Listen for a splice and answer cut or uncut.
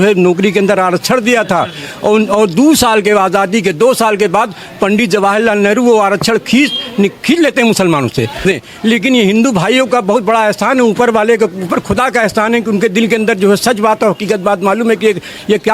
cut